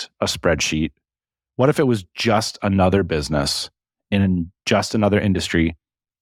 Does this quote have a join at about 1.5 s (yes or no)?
no